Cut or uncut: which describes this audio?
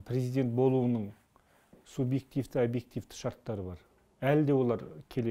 uncut